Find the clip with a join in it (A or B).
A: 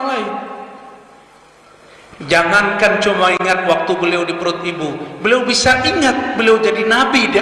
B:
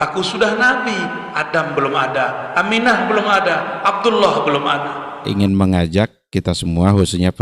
B